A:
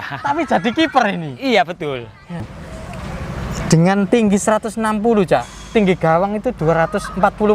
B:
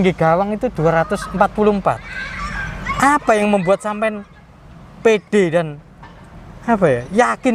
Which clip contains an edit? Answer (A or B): A